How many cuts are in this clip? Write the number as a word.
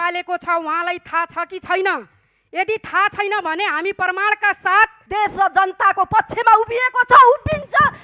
one